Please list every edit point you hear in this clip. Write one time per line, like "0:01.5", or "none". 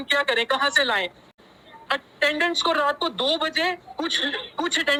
none